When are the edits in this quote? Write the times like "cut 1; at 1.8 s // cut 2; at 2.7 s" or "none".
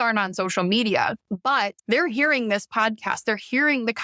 cut 1; at 1.5 s